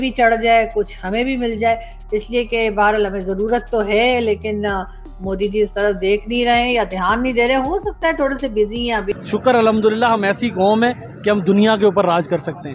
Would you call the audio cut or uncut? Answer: uncut